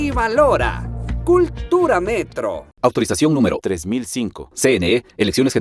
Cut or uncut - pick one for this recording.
uncut